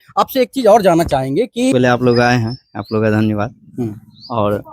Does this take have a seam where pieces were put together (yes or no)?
yes